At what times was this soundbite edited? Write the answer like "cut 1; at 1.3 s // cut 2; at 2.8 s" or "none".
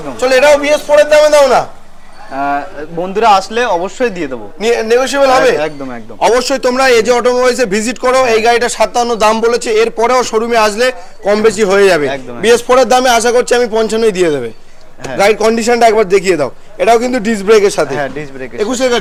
none

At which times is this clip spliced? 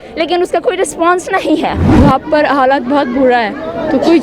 cut 1; at 1.9 s

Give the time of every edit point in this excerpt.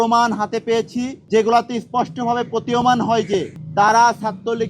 cut 1; at 1.2 s // cut 2; at 3.6 s

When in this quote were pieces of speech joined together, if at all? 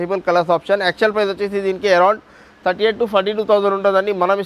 none

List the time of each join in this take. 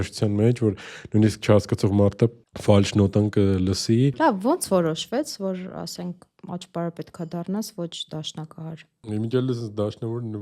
cut 1; at 4.1 s

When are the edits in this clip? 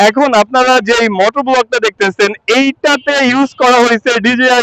none

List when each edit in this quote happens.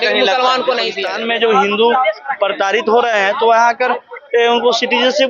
cut 1; at 1.0 s

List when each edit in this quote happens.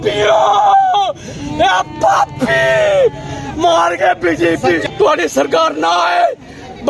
cut 1; at 4.9 s

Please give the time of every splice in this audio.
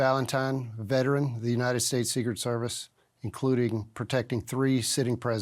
none

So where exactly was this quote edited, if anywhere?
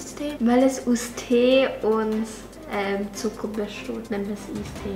none

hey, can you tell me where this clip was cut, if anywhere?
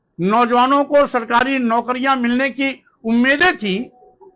none

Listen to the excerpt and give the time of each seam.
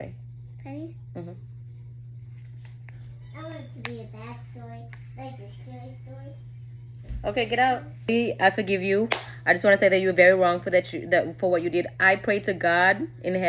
cut 1; at 8.1 s

